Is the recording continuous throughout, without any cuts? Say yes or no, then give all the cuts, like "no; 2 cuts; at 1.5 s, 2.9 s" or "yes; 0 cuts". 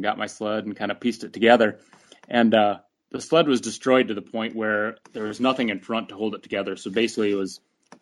yes; 0 cuts